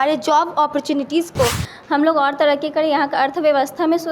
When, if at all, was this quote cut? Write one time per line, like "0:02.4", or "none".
0:01.7